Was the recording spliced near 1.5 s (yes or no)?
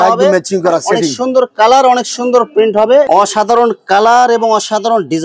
no